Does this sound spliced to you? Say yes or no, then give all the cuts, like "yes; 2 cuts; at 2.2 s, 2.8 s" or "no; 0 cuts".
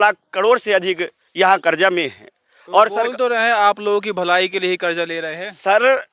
no; 0 cuts